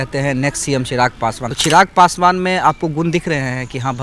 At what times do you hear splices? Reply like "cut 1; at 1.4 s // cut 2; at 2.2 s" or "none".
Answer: cut 1; at 1.5 s